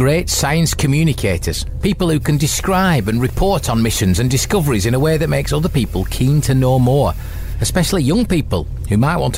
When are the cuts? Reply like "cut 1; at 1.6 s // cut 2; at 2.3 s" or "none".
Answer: none